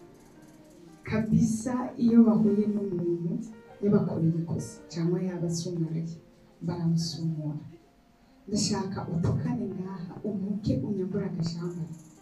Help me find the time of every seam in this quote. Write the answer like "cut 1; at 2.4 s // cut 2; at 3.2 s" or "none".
none